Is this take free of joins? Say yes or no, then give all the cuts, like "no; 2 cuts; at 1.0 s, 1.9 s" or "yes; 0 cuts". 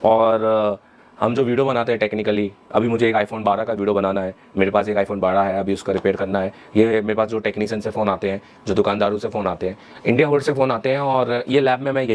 yes; 0 cuts